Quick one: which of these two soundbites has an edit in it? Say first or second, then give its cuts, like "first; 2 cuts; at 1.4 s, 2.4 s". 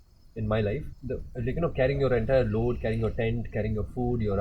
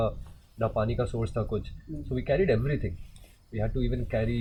first; 1 cut; at 0.9 s